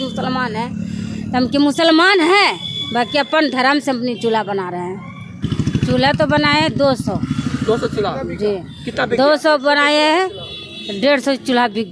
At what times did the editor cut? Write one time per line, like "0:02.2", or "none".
0:05.4